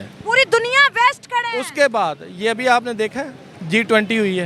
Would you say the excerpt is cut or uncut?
uncut